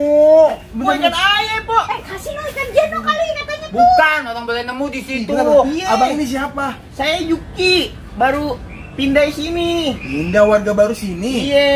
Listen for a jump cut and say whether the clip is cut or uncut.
uncut